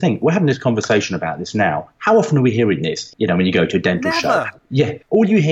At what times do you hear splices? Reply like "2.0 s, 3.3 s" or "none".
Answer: 3.1 s, 4.5 s